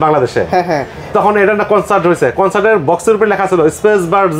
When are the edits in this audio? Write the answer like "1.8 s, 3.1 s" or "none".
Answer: none